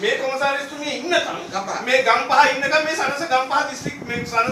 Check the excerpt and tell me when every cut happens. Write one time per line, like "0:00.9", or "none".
none